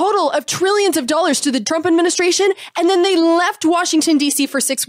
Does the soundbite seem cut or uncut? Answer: uncut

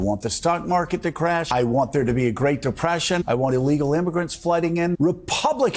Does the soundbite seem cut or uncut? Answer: cut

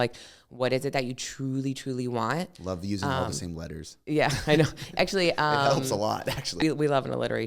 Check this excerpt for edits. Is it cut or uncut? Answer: cut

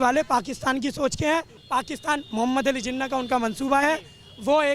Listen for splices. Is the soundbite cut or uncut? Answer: cut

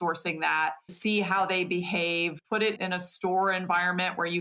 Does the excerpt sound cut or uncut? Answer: cut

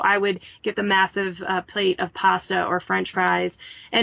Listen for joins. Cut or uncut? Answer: uncut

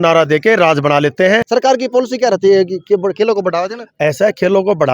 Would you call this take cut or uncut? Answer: cut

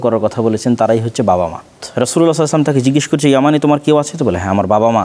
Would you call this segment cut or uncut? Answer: cut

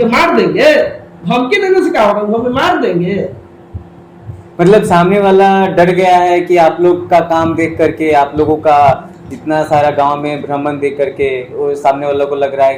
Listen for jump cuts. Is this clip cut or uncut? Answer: uncut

